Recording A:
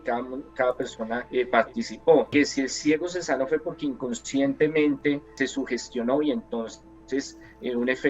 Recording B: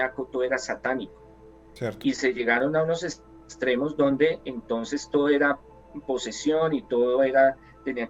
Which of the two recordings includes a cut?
A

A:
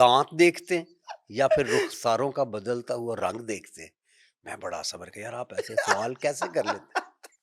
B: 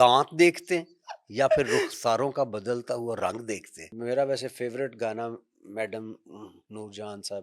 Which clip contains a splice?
B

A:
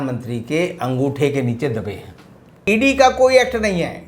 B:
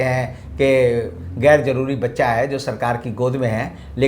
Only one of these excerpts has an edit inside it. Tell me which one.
A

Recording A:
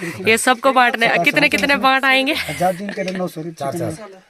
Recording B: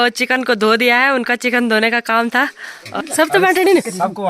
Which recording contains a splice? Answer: B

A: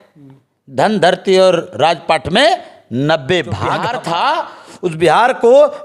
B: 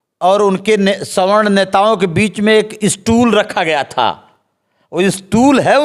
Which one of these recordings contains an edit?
A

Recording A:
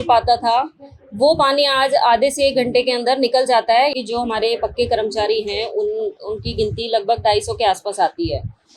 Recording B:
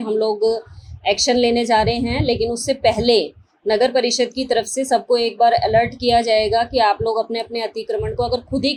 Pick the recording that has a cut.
A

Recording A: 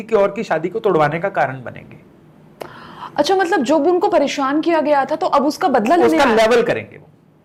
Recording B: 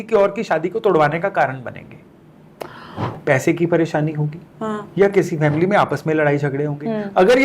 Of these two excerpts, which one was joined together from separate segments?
B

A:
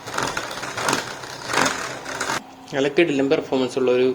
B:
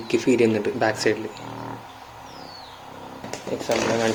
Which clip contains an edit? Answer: A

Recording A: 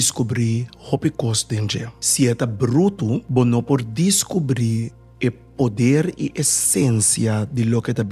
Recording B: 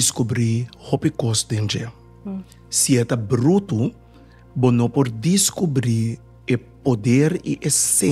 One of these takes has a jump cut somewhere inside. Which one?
A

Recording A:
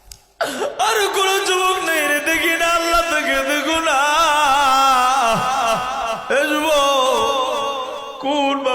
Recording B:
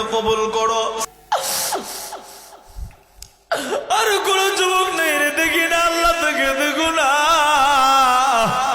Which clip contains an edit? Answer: B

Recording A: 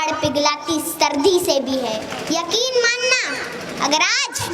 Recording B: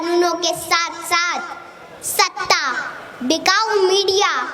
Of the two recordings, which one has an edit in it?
A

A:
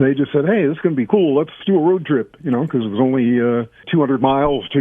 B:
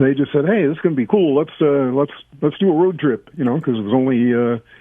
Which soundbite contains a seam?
A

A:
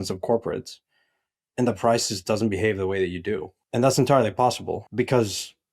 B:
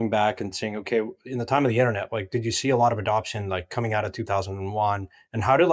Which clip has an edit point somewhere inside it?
A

